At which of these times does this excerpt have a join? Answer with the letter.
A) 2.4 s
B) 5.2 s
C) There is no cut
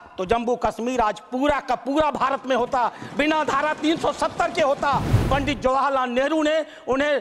B